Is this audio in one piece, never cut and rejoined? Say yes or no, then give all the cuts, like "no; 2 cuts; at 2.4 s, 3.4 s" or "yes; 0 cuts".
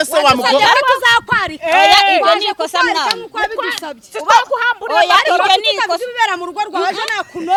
yes; 0 cuts